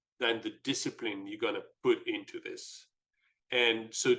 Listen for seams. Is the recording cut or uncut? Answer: uncut